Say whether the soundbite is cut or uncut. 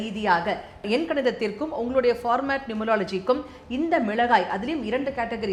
uncut